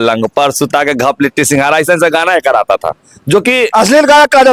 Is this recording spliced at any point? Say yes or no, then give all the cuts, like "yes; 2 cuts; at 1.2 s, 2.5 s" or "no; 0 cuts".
no; 0 cuts